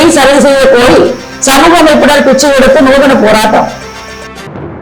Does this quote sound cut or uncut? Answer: uncut